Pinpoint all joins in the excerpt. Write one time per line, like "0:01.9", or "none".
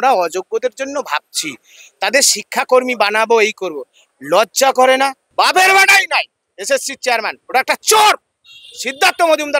0:05.2